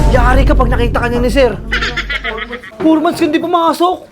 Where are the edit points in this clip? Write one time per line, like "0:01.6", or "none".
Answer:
0:02.6

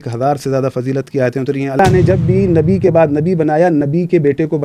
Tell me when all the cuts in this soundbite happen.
0:01.8

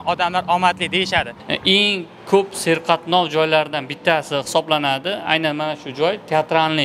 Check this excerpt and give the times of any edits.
0:01.4

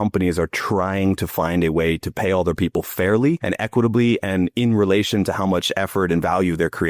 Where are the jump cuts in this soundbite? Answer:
0:03.5

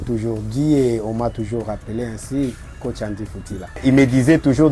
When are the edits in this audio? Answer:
0:03.8

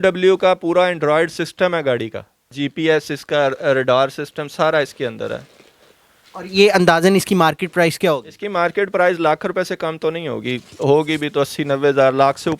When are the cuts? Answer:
none

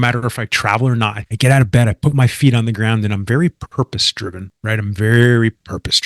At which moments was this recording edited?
0:01.2

